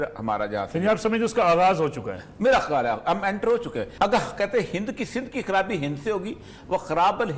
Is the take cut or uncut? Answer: cut